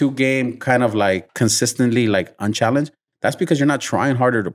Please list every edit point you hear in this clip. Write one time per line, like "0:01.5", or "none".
0:01.3